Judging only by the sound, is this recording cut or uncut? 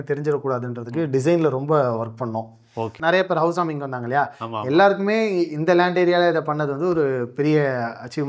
cut